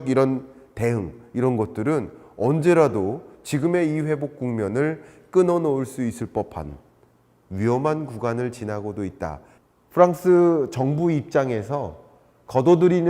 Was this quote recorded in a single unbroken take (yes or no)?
no